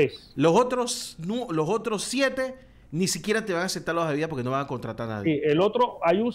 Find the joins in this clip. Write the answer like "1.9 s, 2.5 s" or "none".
none